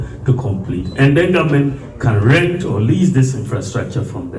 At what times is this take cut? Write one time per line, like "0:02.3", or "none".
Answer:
none